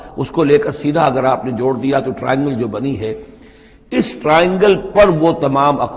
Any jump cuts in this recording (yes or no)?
no